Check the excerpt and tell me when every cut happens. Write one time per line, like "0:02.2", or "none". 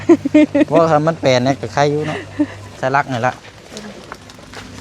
0:02.8